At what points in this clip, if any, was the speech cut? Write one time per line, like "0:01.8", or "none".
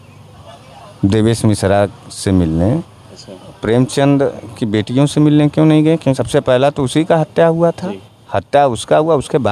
0:06.2

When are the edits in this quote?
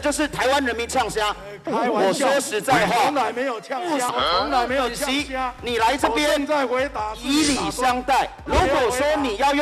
0:04.1
0:08.5

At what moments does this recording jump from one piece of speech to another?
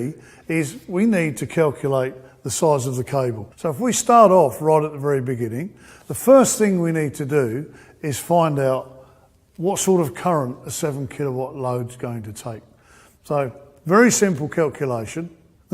0:05.0

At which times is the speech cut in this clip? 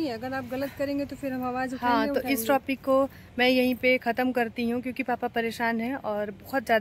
none

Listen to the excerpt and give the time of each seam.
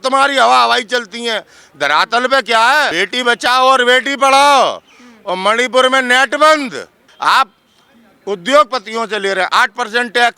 0:03.0
0:07.0

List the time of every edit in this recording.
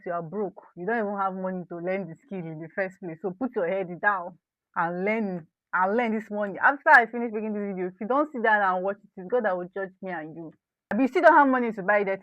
0:10.9

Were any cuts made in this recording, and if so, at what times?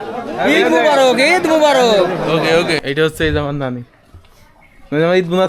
0:02.8

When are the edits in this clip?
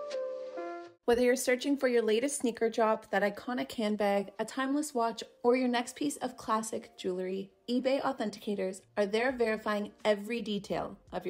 none

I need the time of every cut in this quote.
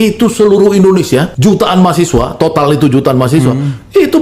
0:01.3

